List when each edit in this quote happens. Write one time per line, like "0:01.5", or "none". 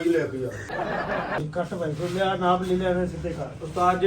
0:01.4